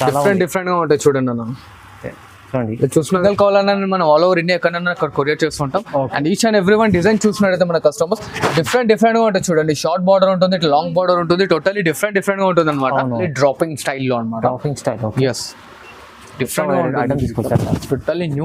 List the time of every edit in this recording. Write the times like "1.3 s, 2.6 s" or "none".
3.1 s, 13.3 s